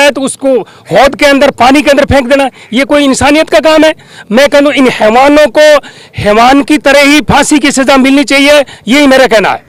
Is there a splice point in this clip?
no; 0 cuts

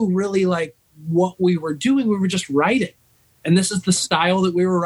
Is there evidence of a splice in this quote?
no; 0 cuts

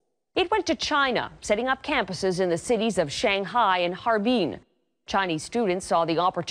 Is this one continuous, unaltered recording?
yes; 0 cuts

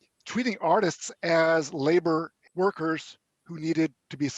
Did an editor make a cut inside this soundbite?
yes; 1 cut; at 2.4 s

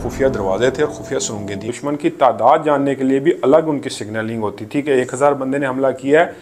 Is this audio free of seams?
no; 1 cut; at 1.7 s

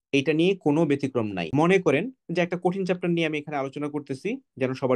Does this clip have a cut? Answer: yes; 1 cut; at 1.5 s

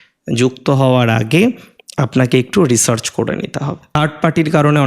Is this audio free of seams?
no; 1 cut; at 3.8 s

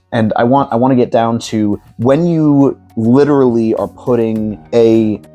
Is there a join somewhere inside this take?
no; 0 cuts

